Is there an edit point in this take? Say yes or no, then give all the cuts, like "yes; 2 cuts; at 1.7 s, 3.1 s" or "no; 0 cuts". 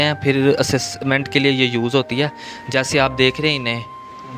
no; 0 cuts